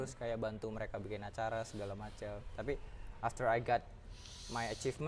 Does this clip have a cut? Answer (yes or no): no